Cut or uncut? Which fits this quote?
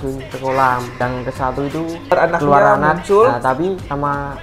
cut